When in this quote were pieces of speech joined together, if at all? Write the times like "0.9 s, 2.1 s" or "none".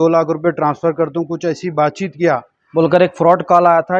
2.6 s